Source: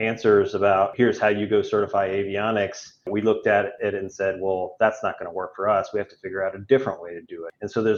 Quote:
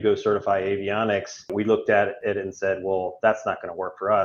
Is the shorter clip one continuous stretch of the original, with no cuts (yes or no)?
no